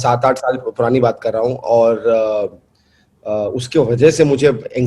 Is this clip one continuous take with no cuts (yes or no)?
yes